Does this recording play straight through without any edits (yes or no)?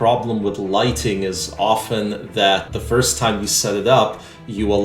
no